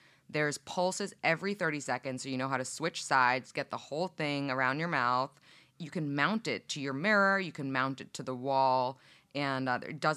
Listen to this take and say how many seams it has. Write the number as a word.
zero